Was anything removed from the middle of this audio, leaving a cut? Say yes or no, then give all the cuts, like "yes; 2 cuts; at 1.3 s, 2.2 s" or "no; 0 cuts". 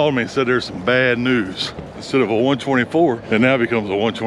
yes; 2 cuts; at 2.0 s, 3.2 s